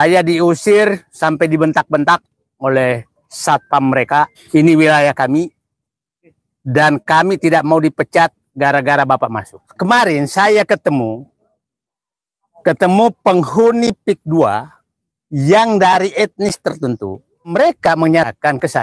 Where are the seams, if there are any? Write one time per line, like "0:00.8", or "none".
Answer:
0:04.4
0:09.7
0:17.5